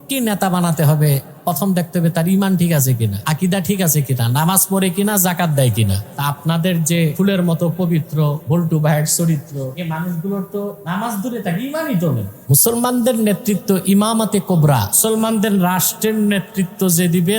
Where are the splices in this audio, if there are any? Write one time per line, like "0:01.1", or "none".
0:03.1
0:06.1
0:07.1
0:08.4
0:09.7
0:10.8
0:12.3
0:14.9